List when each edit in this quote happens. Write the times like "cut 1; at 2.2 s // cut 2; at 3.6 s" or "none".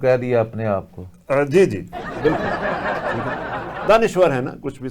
cut 1; at 2.3 s // cut 2; at 3.8 s